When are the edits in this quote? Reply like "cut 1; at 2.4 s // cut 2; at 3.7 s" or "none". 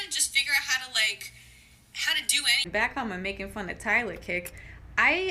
cut 1; at 2.9 s

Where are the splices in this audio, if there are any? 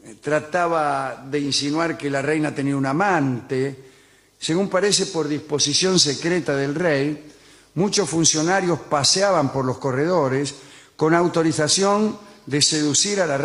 none

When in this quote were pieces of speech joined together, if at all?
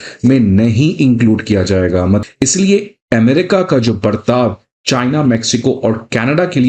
cut 1; at 2.2 s

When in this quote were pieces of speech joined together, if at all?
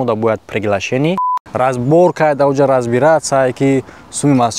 cut 1; at 1.3 s

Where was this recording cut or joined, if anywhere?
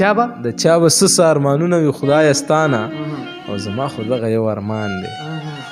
none

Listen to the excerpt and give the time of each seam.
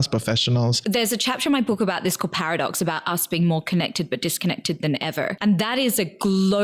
cut 1; at 0.8 s // cut 2; at 5.4 s

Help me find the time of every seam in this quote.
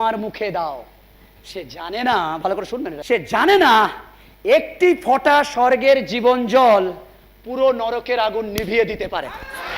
cut 1; at 2.9 s

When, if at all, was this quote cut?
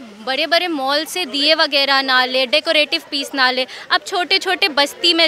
none

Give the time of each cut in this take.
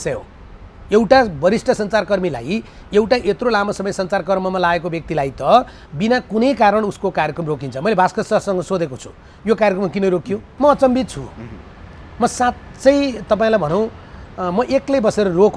cut 1; at 10.5 s

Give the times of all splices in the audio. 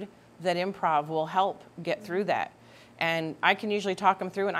none

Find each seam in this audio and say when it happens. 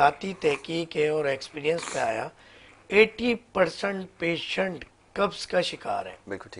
none

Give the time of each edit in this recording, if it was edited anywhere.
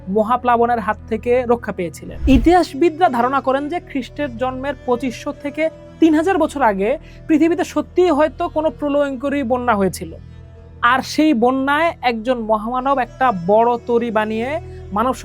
cut 1; at 2.0 s

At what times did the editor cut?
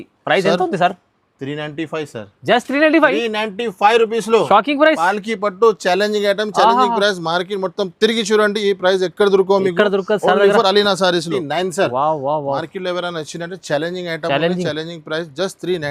cut 1; at 11.4 s

